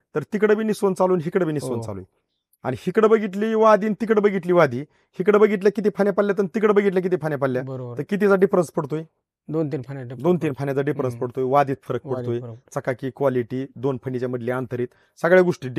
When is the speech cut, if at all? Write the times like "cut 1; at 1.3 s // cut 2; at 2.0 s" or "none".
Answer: none